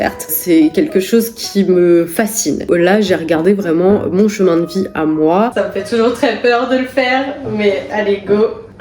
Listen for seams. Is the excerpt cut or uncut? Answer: cut